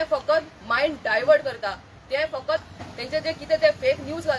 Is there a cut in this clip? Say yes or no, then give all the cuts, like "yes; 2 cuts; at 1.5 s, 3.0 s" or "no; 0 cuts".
yes; 1 cut; at 2.7 s